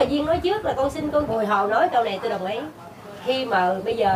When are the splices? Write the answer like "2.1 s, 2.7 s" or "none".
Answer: 1.3 s